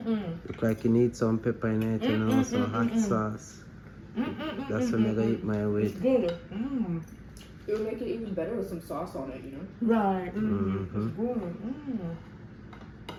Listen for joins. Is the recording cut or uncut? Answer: uncut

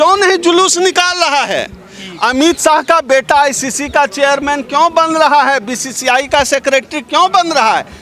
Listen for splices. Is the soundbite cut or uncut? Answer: uncut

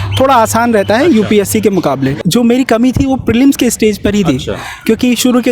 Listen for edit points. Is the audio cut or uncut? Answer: cut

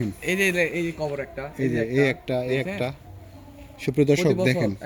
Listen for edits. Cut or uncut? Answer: uncut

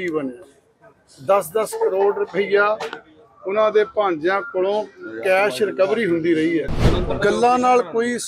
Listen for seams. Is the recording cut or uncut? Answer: cut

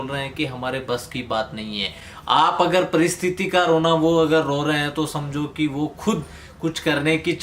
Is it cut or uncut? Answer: uncut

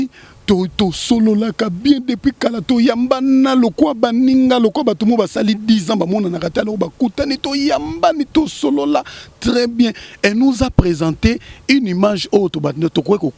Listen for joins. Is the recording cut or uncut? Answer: uncut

